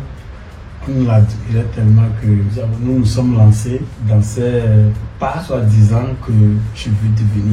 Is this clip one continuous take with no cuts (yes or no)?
no